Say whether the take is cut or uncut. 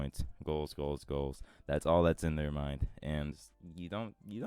cut